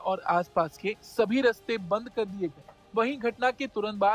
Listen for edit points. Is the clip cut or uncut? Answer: uncut